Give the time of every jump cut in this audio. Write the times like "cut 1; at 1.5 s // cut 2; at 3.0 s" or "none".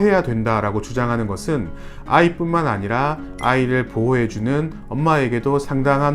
none